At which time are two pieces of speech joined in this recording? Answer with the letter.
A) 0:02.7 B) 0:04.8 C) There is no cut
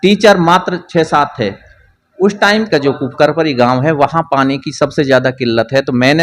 A